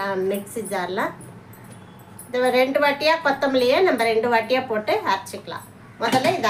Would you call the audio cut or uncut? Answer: uncut